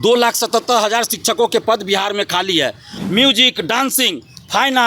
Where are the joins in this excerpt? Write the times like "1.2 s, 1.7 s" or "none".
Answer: 2.9 s